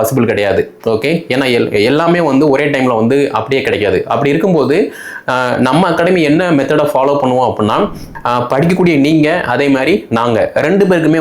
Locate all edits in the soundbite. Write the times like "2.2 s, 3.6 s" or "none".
8.0 s